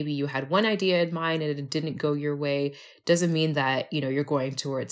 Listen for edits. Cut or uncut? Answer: uncut